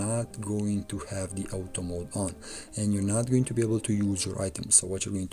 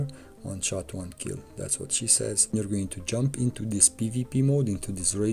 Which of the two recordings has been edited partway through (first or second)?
second